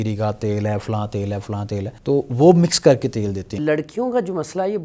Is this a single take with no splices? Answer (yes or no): no